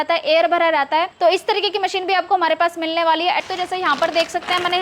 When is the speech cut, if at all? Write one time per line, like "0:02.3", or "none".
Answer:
0:01.1
0:03.4